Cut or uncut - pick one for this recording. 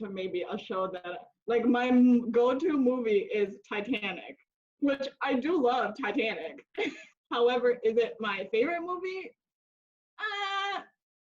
cut